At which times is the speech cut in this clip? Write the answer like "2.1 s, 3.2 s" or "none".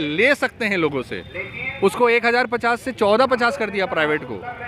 none